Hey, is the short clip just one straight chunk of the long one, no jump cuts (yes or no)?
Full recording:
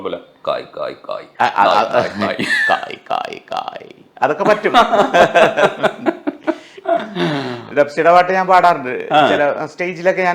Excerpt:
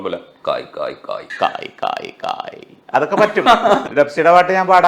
no